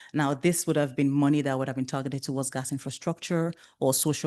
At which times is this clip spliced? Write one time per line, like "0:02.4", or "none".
none